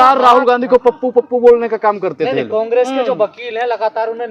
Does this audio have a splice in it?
no; 0 cuts

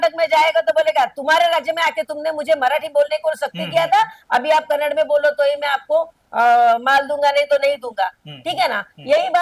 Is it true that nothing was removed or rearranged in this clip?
yes; 0 cuts

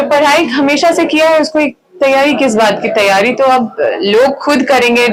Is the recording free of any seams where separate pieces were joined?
yes; 0 cuts

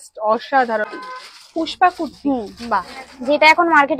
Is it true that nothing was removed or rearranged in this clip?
no; 1 cut; at 1.0 s

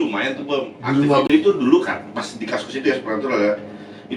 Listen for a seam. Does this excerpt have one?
yes; 1 cut; at 1.3 s

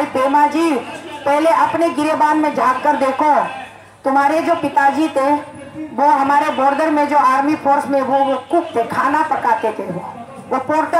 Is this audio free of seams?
yes; 0 cuts

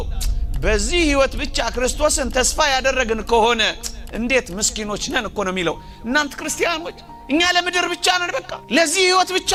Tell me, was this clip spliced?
no; 0 cuts

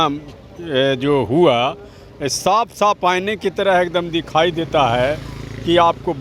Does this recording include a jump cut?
no; 0 cuts

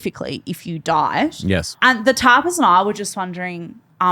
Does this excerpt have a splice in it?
yes; 1 cut; at 1.8 s

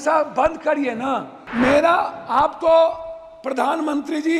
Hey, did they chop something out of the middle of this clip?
yes; 1 cut; at 1.4 s

